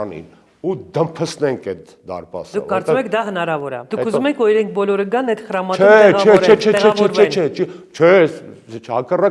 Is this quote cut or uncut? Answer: cut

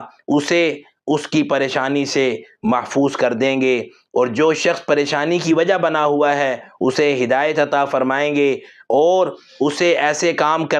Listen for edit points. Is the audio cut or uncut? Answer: uncut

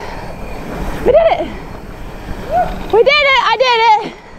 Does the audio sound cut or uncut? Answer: uncut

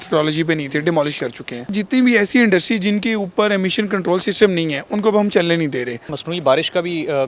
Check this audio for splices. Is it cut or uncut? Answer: cut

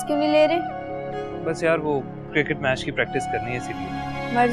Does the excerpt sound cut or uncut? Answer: uncut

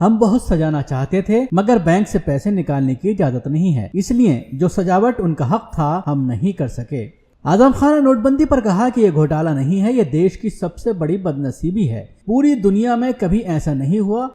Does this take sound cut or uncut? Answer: cut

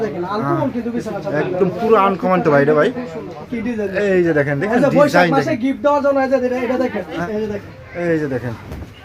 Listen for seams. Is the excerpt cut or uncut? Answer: cut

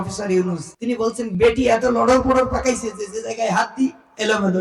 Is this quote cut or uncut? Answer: cut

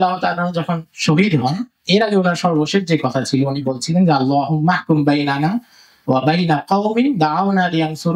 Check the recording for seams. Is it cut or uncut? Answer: uncut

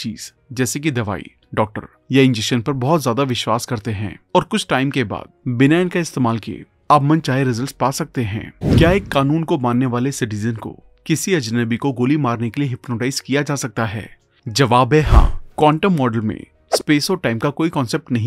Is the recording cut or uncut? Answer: cut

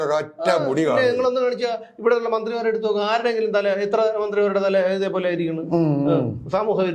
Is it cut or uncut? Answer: uncut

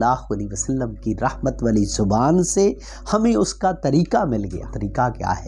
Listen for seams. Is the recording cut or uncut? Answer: uncut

